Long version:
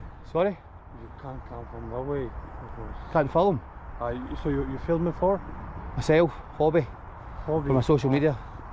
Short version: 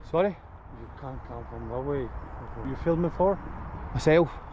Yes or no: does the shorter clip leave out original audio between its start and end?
yes